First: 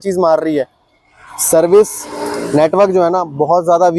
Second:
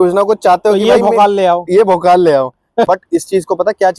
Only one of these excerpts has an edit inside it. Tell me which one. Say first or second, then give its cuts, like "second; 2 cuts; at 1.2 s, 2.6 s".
second; 1 cut; at 2.9 s